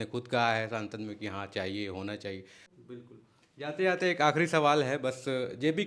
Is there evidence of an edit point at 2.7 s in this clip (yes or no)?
yes